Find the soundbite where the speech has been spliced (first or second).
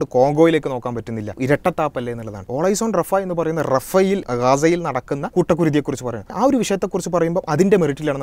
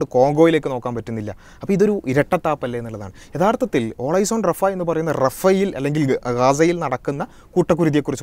first